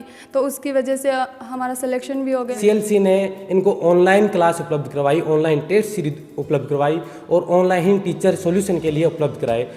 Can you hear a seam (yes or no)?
yes